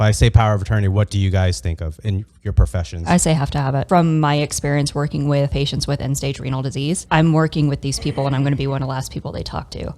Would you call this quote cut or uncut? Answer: cut